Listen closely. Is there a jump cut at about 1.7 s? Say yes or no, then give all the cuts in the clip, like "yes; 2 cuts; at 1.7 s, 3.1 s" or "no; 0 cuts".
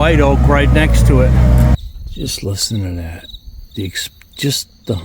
yes; 1 cut; at 1.7 s